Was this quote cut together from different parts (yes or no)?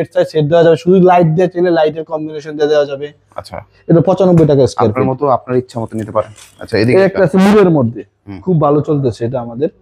no